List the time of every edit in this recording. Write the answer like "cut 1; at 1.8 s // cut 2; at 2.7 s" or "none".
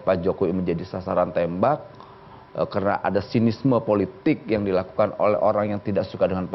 none